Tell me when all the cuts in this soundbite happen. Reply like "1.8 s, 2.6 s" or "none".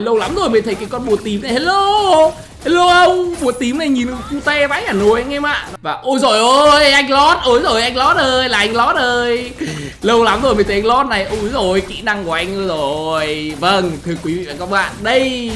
5.7 s